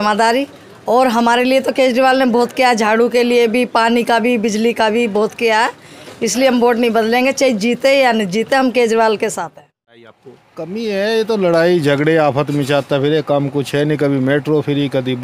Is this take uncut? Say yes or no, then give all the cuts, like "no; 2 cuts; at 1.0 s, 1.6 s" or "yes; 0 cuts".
no; 1 cut; at 10.2 s